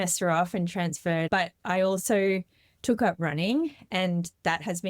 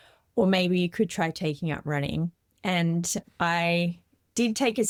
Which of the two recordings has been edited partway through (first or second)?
first